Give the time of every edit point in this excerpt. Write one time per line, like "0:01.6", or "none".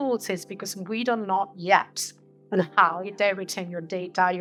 none

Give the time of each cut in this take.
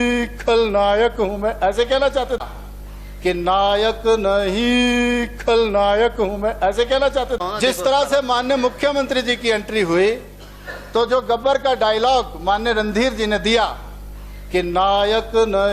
0:02.4
0:07.4

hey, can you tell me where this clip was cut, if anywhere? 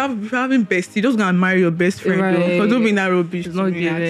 none

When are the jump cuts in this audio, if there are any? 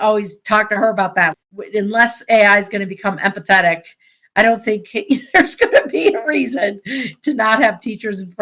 0:01.4

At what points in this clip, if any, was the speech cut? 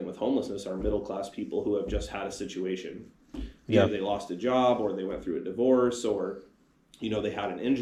none

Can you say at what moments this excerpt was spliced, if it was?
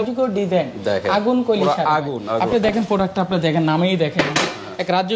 none

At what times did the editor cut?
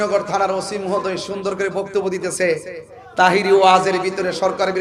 none

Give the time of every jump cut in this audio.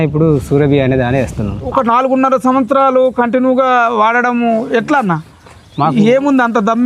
0:01.7

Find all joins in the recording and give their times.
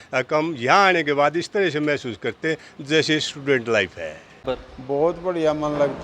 0:04.4

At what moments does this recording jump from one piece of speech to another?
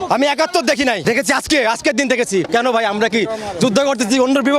0:01.0
0:02.5

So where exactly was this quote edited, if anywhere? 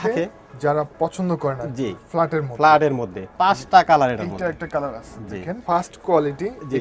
0:05.6

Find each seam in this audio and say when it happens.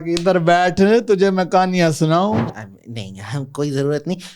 0:02.5

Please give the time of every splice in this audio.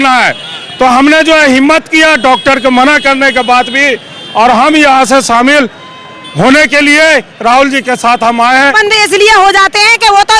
0:08.7

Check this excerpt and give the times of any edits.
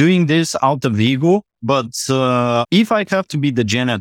0:02.7

